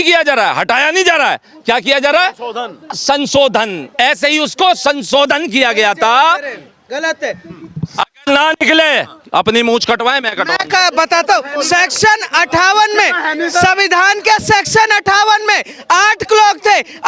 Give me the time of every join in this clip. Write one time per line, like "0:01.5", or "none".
none

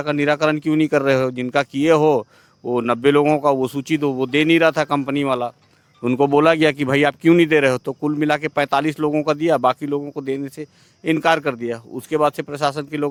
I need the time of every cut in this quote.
none

